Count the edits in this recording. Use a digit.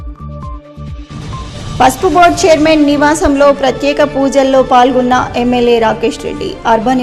0